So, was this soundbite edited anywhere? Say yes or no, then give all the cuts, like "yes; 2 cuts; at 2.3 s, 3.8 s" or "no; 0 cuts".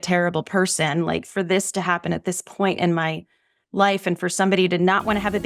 no; 0 cuts